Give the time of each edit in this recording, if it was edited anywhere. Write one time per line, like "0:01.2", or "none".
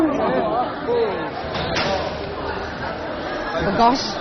0:01.8